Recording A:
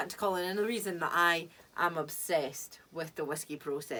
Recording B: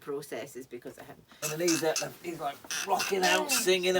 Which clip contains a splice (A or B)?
B